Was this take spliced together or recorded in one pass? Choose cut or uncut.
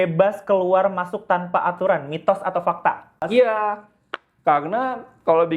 cut